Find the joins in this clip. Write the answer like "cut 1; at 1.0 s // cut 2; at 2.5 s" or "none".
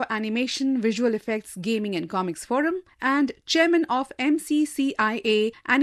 none